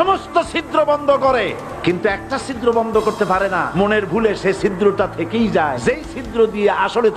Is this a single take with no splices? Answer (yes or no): no